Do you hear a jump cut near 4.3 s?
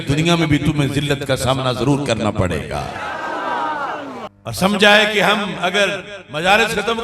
yes; 1 cut; at 4.3 s

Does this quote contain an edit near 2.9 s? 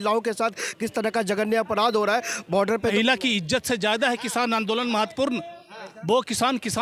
yes; 1 cut; at 2.9 s

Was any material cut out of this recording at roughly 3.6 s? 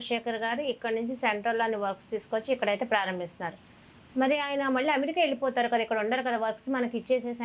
no; 0 cuts

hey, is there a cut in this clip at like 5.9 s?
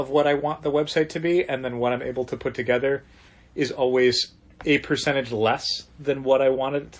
no; 0 cuts

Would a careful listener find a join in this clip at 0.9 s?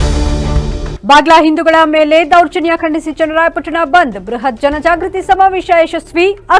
yes; 1 cut; at 0.9 s

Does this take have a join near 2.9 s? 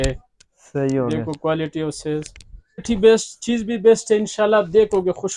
yes; 1 cut; at 2.9 s

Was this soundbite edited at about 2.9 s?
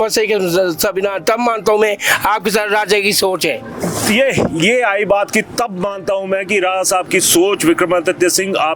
no; 0 cuts

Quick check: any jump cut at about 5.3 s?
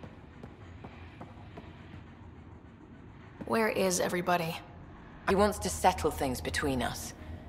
no; 0 cuts

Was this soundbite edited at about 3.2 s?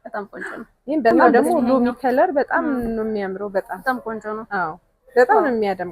no; 1 cut; at 1.1 s

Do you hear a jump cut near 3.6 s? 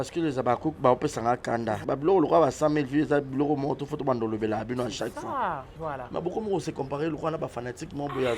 no; 2 cuts; at 1.8 s, 5.7 s

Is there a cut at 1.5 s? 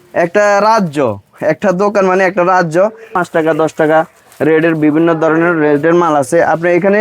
no; 1 cut; at 3.1 s

